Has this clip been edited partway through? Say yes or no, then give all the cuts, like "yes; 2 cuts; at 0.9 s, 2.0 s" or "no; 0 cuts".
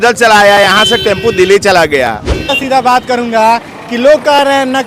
yes; 1 cut; at 2.6 s